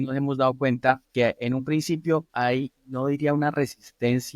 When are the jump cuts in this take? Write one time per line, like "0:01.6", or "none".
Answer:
0:01.1

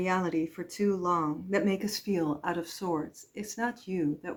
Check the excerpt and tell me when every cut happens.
none

